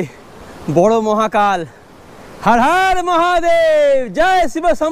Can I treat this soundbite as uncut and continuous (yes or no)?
yes